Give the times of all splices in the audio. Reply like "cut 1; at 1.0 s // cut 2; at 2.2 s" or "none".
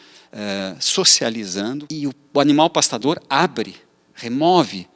cut 1; at 1.9 s